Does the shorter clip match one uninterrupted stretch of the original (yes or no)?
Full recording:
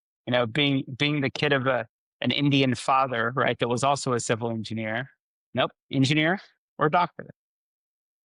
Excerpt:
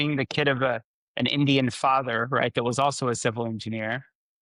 yes